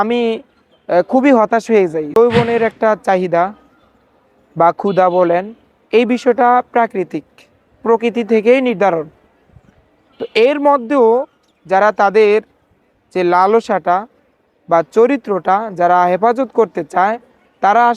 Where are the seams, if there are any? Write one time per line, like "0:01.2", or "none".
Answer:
0:02.1